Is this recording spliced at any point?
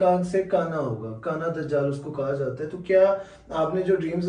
no; 0 cuts

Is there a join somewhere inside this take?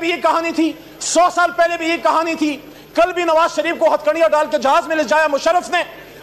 no; 0 cuts

